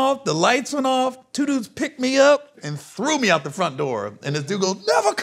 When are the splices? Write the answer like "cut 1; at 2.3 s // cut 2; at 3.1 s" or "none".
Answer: cut 1; at 2.5 s